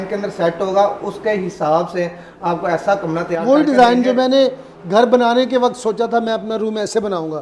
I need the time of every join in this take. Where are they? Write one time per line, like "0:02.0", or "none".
none